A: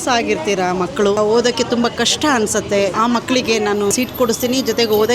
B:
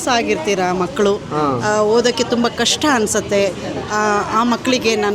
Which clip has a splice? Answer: A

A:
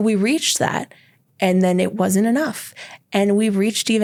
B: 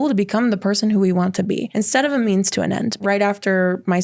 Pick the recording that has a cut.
B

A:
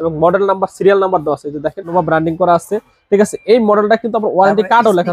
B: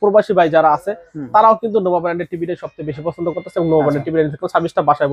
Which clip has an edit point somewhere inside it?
A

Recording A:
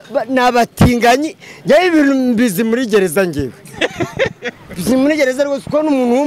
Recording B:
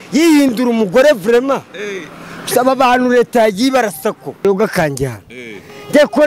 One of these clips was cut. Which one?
B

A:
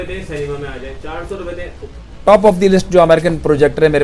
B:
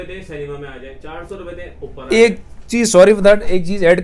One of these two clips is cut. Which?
A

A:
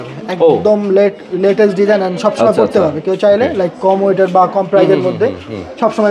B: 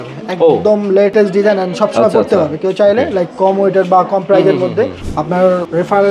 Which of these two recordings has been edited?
B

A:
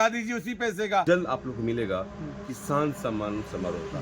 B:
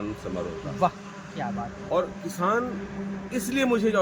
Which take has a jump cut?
A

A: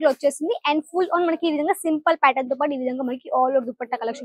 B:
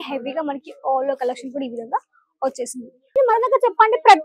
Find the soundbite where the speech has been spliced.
B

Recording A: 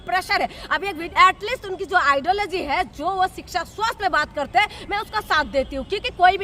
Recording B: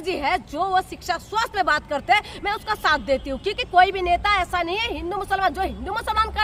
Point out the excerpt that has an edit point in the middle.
A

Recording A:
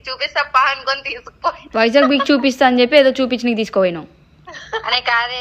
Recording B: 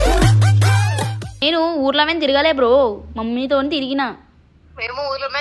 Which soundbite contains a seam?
B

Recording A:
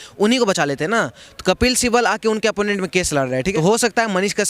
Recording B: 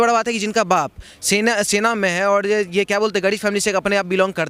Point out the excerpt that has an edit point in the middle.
A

